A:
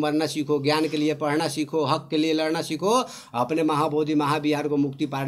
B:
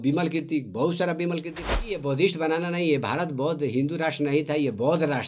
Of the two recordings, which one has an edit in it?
B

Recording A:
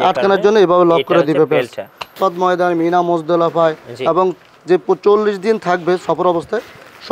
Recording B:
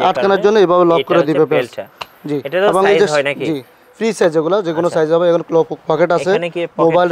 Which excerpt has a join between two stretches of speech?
A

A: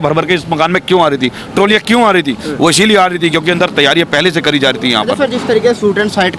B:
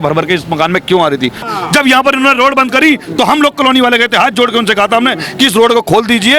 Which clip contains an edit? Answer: B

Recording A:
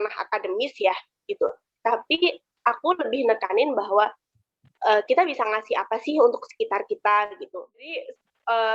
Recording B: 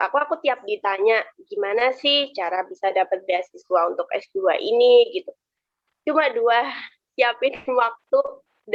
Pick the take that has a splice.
A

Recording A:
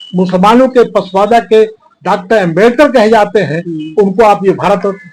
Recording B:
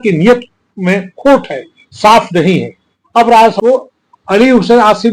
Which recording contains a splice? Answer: B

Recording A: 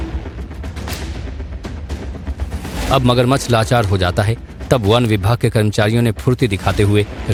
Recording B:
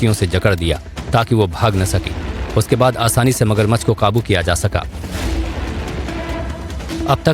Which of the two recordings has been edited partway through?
B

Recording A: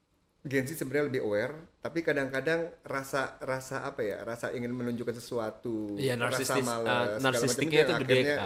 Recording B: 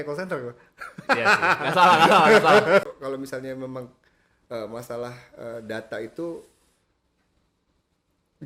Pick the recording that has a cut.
B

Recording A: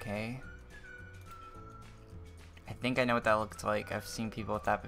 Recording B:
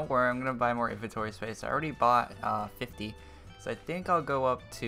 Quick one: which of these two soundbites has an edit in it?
B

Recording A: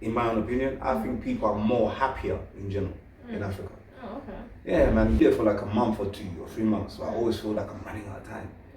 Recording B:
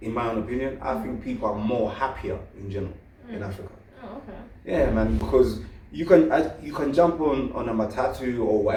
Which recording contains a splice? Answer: A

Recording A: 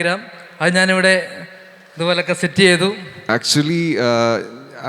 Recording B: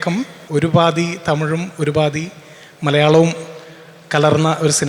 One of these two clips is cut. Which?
A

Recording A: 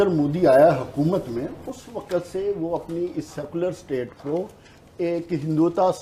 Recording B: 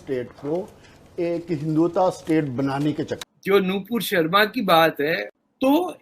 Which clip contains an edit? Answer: B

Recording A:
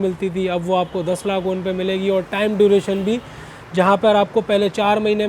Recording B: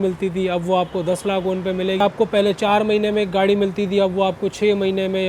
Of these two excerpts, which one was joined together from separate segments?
B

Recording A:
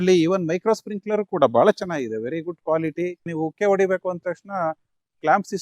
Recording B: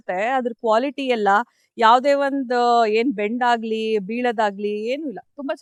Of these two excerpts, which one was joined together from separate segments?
A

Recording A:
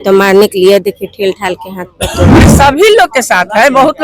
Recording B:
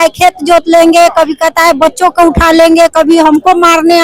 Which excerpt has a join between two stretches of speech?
A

